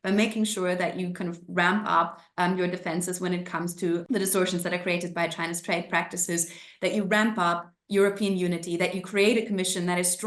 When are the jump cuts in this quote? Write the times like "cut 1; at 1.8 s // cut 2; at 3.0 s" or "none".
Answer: cut 1; at 4.0 s